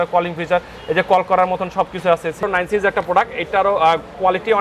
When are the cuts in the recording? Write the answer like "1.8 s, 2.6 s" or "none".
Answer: 2.4 s